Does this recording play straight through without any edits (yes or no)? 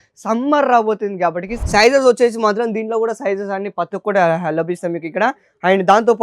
no